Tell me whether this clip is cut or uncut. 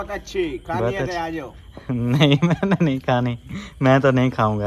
uncut